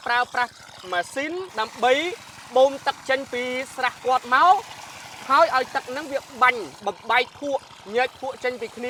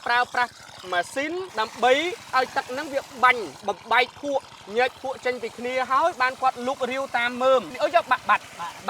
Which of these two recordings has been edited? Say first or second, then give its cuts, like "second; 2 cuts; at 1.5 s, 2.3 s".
second; 2 cuts; at 2.3 s, 7.7 s